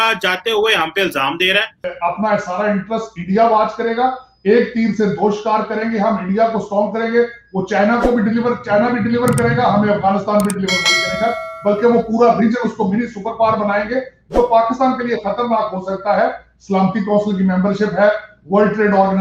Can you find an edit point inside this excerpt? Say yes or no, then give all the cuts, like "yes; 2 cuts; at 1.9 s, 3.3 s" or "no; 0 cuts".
yes; 1 cut; at 1.8 s